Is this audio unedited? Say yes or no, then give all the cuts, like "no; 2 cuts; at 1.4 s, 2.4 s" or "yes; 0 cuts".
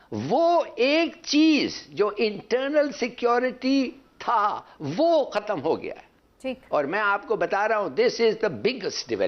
yes; 0 cuts